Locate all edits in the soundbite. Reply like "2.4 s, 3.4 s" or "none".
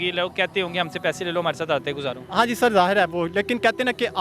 none